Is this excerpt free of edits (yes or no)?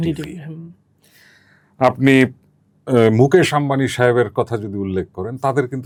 yes